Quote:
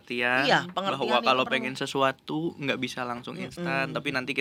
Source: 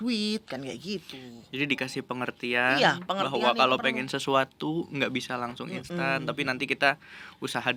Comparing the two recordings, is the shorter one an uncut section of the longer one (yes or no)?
yes